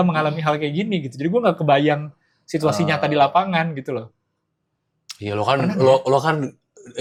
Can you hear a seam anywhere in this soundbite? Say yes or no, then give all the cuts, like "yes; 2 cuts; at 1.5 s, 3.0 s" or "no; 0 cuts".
no; 0 cuts